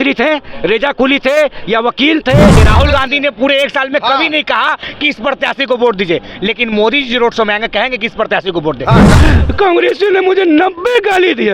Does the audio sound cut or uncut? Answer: cut